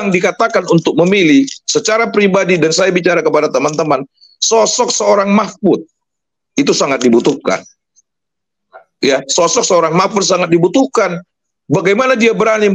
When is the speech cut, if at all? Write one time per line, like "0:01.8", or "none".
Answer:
none